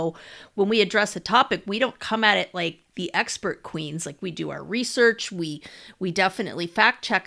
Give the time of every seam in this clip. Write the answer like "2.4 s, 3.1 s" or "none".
none